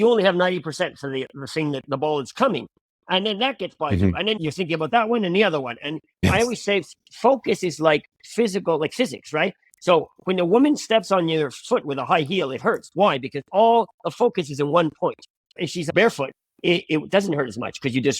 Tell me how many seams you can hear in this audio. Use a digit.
1